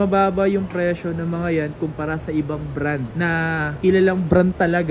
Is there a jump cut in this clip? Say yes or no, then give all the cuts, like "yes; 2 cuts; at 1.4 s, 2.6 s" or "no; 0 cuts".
no; 0 cuts